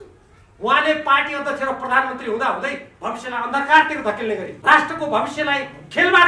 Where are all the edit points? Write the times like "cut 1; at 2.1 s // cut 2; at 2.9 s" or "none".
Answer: cut 1; at 2.9 s // cut 2; at 4.5 s